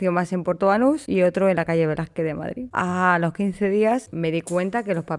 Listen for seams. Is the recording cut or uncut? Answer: cut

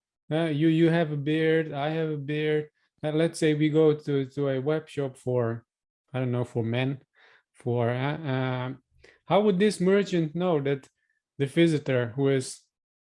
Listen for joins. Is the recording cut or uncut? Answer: uncut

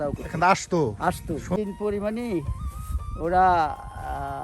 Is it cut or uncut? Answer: cut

